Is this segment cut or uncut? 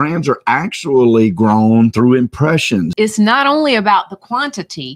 cut